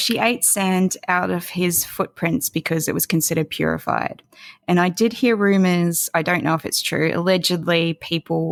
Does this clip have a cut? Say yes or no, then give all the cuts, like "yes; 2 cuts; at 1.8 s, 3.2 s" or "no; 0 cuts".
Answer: no; 0 cuts